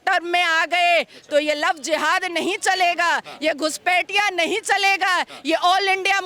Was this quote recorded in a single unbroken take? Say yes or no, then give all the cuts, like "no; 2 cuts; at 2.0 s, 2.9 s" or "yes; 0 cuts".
yes; 0 cuts